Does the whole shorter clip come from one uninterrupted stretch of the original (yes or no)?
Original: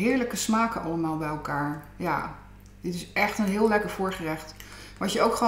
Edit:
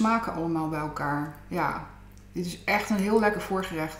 yes